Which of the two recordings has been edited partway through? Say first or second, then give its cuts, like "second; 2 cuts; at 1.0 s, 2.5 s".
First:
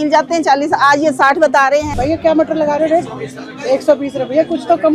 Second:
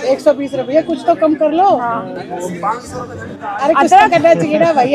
first; 1 cut; at 1.9 s